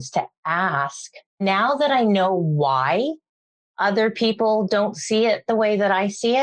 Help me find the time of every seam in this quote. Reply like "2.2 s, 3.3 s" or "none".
1.4 s